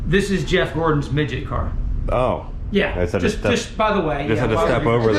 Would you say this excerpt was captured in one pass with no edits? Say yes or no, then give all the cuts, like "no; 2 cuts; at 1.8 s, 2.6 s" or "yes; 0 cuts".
yes; 0 cuts